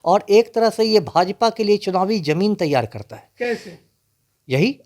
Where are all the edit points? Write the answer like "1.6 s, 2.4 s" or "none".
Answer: none